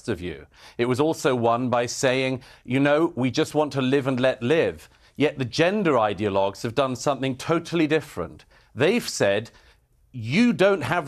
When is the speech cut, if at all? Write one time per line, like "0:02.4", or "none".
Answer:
none